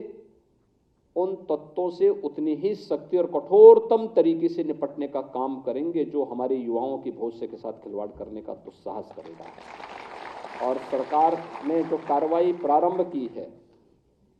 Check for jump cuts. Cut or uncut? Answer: uncut